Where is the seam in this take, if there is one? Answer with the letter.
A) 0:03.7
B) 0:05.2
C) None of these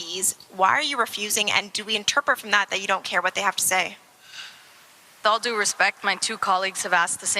B